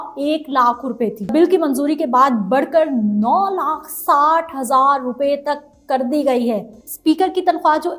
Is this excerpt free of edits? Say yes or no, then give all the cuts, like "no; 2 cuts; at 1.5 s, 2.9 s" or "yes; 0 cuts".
no; 2 cuts; at 1.3 s, 6.9 s